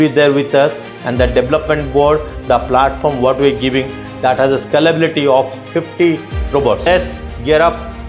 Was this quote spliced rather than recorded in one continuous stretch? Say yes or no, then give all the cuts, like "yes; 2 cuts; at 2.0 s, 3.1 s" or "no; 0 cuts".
yes; 1 cut; at 6.9 s